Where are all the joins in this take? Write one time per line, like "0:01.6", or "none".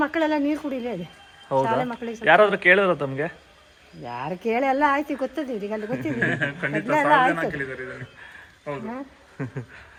none